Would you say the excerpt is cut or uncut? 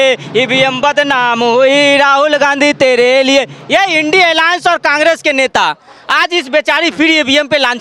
uncut